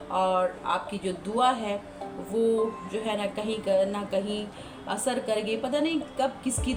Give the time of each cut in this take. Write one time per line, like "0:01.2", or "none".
none